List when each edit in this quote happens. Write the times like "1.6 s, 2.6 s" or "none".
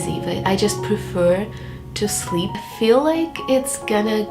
2.6 s